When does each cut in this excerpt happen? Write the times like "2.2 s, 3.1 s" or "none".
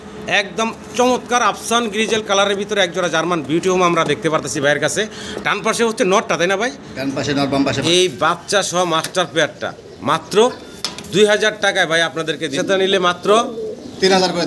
7.8 s, 12.5 s